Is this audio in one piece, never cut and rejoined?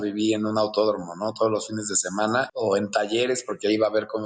no; 1 cut; at 2.5 s

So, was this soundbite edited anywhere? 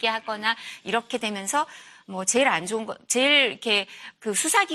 no; 0 cuts

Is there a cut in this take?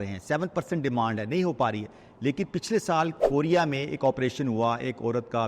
no; 0 cuts

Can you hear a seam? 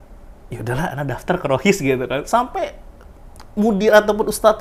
no; 0 cuts

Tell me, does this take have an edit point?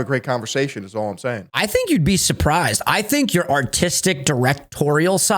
yes; 1 cut; at 1.5 s

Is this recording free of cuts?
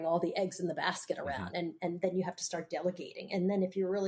yes; 0 cuts

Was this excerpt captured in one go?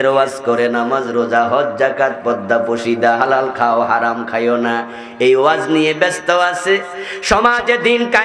yes; 0 cuts

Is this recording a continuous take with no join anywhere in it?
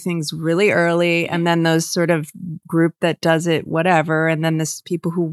yes; 0 cuts

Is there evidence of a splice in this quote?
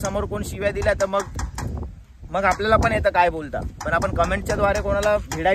no; 0 cuts

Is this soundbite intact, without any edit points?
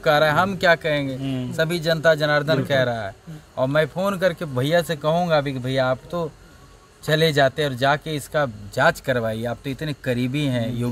yes; 0 cuts

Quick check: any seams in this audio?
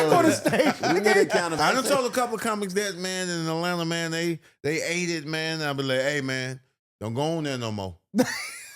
yes; 1 cut; at 1.6 s

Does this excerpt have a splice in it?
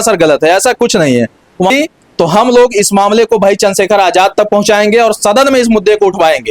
yes; 1 cut; at 1.7 s

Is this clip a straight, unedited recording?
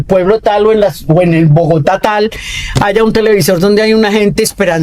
yes; 0 cuts

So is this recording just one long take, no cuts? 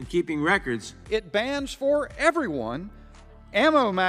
no; 1 cut; at 0.9 s

